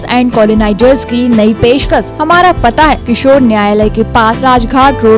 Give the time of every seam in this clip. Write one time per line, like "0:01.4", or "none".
0:02.1
0:03.0
0:04.4

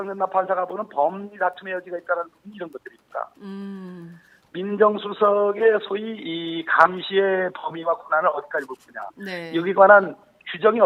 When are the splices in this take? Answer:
none

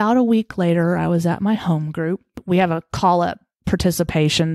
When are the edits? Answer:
0:02.4

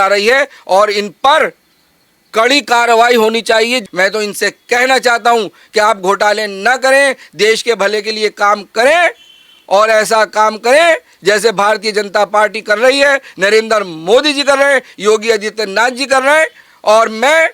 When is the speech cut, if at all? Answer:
0:03.8

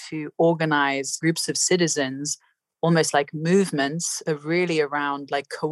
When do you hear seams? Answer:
0:01.1

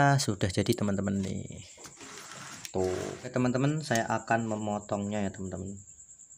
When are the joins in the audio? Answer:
0:03.2

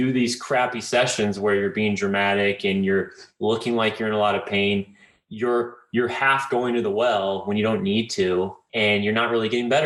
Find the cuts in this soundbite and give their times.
none

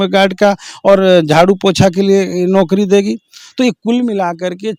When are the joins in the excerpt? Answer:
none

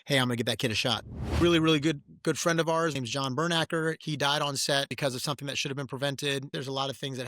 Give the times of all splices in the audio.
0:01.4
0:02.9
0:04.0
0:04.9
0:06.5

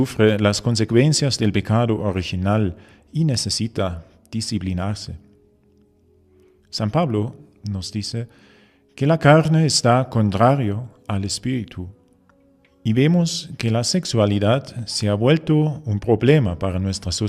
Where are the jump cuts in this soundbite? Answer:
0:01.0

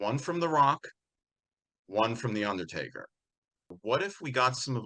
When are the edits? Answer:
0:03.8

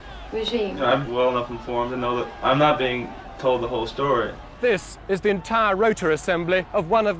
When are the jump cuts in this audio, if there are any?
0:01.0
0:02.3
0:04.6

